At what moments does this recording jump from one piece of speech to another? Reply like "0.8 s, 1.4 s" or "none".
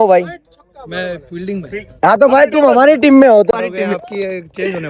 3.5 s